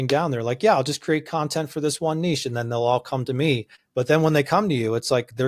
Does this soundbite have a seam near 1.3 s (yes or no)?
no